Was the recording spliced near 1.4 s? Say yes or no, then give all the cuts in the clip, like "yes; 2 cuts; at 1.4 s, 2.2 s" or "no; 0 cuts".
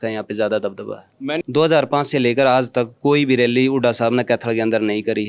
yes; 1 cut; at 1.4 s